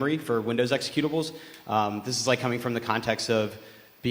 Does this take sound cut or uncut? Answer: cut